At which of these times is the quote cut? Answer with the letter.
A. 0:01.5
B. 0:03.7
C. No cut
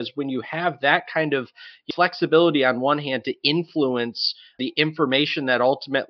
C